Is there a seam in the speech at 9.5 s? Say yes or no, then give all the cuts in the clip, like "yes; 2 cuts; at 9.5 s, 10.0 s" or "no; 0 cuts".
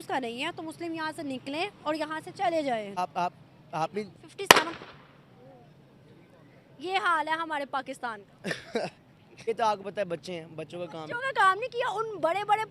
yes; 2 cuts; at 2.9 s, 9.5 s